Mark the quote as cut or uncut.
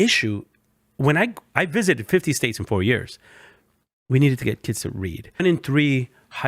cut